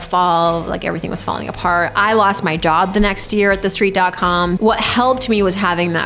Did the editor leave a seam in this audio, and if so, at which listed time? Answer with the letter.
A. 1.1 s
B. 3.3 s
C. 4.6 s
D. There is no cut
C